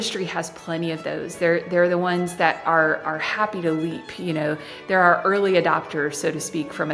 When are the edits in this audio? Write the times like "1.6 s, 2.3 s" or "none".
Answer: none

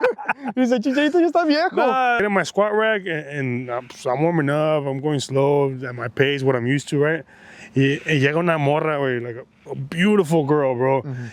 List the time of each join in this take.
2.2 s

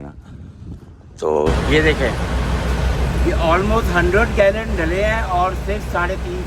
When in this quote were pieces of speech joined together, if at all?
1.6 s

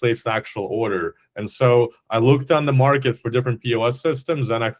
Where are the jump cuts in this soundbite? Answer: none

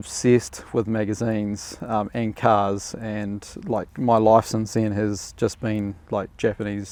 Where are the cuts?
none

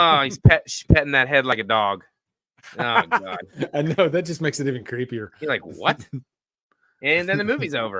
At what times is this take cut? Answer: none

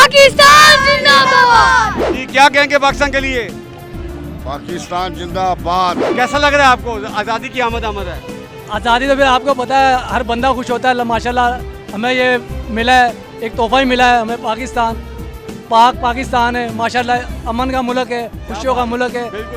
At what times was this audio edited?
none

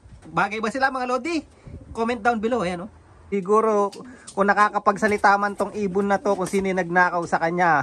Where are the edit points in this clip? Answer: 3.3 s

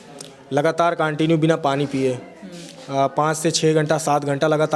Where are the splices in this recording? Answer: none

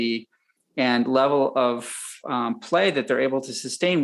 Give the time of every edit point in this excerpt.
none

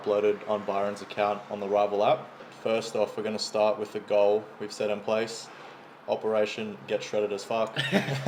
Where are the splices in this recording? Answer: none

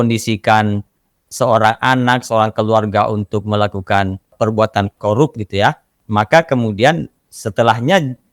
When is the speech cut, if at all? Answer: 4.3 s, 5.9 s

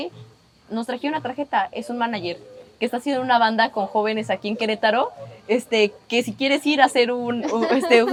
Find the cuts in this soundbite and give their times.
none

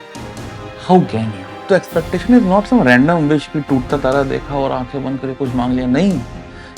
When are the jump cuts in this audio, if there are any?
1.5 s

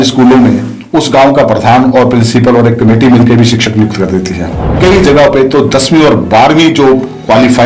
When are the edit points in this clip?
4.7 s

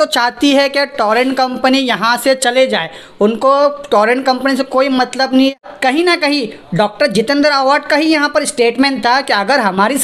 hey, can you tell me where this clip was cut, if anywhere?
5.6 s

